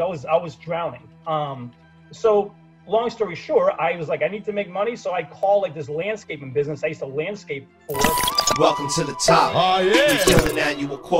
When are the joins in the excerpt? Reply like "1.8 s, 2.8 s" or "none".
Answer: 8.1 s